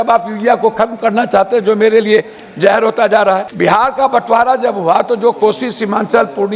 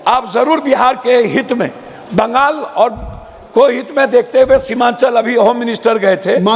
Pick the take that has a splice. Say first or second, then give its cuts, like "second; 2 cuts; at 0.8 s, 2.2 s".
first; 1 cut; at 3.5 s